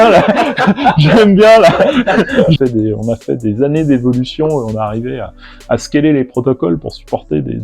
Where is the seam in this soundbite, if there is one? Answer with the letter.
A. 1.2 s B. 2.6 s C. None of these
B